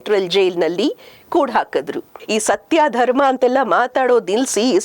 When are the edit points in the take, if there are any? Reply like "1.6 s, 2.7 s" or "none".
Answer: 2.1 s